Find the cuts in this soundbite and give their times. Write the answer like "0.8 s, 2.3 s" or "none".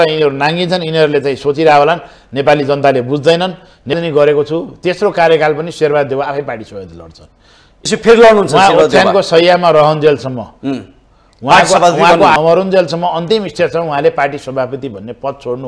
3.9 s, 7.7 s, 12.3 s